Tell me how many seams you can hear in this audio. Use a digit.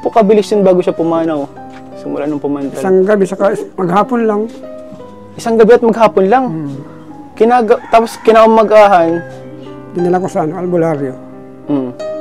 0